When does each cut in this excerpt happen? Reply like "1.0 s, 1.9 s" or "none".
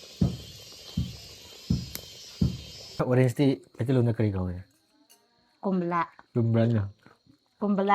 3.0 s, 6.2 s